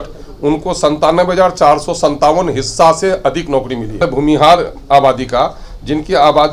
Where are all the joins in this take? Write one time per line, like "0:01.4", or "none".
0:04.0